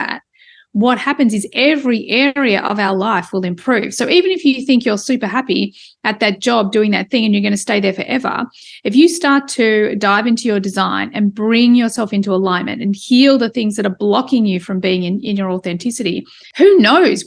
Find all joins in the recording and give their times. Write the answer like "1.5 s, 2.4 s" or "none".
16.4 s